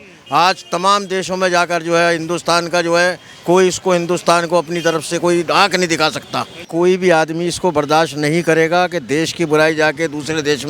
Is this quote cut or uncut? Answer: cut